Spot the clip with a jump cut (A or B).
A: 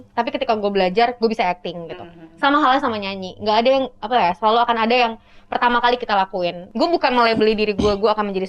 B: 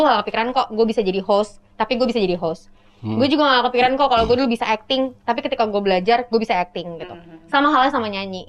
A